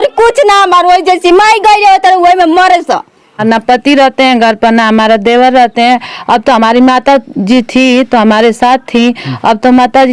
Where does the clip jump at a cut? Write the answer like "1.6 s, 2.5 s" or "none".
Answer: 3.4 s